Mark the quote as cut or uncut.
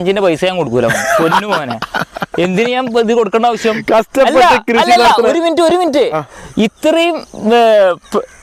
uncut